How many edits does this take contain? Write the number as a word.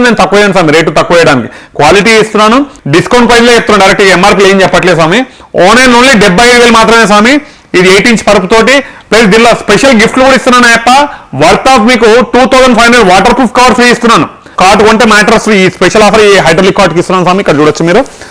two